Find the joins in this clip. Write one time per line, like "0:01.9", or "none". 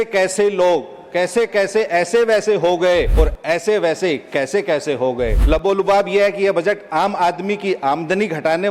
0:03.1
0:05.4